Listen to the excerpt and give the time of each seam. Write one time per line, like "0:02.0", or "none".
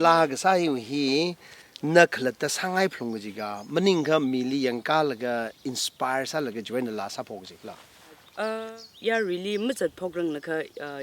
0:08.7